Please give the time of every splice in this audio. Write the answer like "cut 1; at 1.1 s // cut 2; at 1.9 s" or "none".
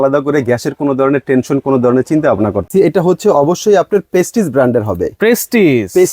cut 1; at 2.7 s